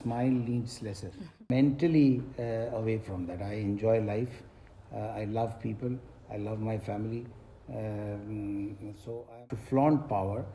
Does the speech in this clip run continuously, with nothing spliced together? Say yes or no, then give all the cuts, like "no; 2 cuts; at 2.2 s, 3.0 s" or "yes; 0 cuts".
no; 2 cuts; at 1.5 s, 9.4 s